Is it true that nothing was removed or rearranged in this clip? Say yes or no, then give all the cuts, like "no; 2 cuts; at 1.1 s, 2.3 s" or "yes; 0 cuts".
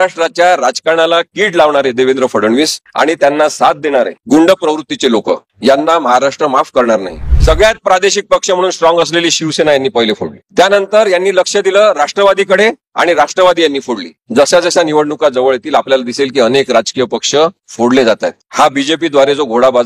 no; 1 cut; at 7.3 s